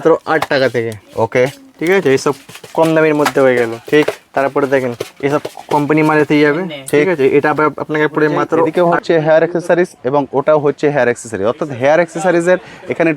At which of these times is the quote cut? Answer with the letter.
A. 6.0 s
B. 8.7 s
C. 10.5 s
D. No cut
B